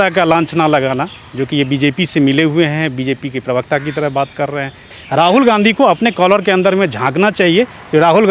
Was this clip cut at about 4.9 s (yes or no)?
yes